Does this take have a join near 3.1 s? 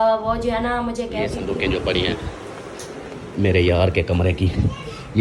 no; 1 cut; at 1.4 s

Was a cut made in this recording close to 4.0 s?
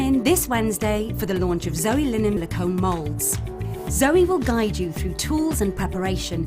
no; 1 cut; at 2.4 s

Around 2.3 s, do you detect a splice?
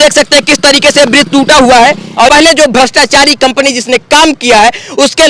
yes; 1 cut; at 2.3 s

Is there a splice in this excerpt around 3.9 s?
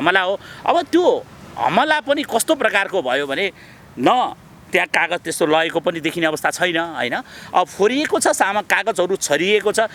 no; 0 cuts

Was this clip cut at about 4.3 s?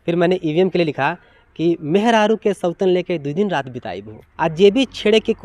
yes; 1 cut; at 4.3 s

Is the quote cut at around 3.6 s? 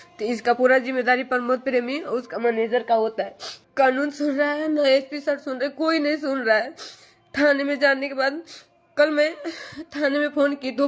yes; 1 cut; at 3.6 s

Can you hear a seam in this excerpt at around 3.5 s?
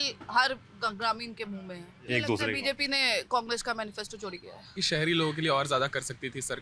no; 2 cuts; at 2.0 s, 4.8 s

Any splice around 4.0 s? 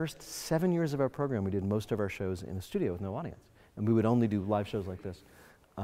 no; 0 cuts

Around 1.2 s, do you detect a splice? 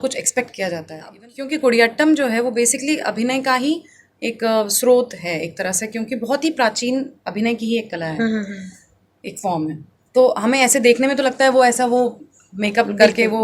yes; 1 cut; at 1.2 s

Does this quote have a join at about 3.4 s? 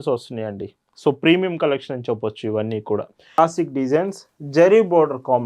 yes; 1 cut; at 3.4 s

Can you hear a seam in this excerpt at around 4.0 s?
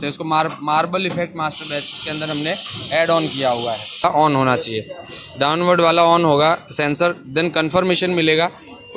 yes; 1 cut; at 4.0 s

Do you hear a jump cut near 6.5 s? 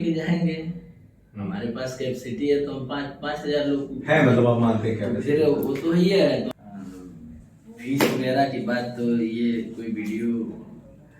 yes; 1 cut; at 6.5 s

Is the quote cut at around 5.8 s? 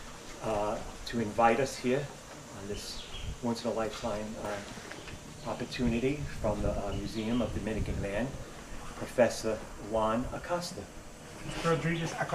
yes; 1 cut; at 5.8 s

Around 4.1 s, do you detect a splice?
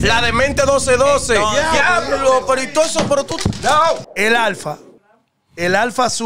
yes; 1 cut; at 4.1 s

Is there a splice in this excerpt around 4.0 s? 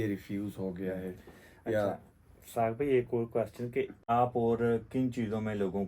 yes; 1 cut; at 4.0 s

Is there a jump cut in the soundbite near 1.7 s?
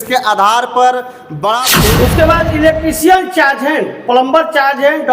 yes; 1 cut; at 1.7 s

